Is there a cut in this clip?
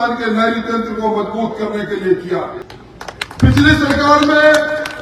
no; 0 cuts

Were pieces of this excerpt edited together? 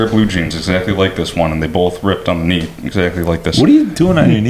no; 0 cuts

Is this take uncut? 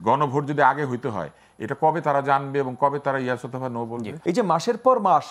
no; 1 cut; at 4.1 s

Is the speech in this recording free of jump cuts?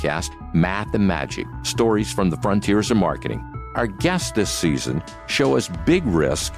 yes; 0 cuts

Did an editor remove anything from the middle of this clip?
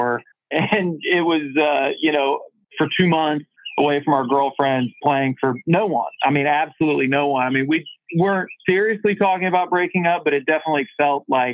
no; 0 cuts

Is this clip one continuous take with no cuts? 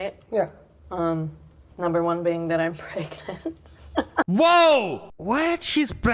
no; 1 cut; at 5.1 s

